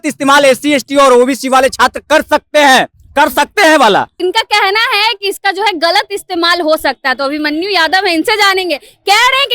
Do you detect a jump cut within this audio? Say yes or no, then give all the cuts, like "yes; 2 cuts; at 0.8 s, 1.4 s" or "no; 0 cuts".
no; 0 cuts